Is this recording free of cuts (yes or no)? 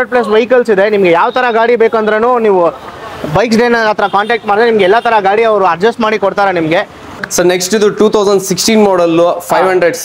no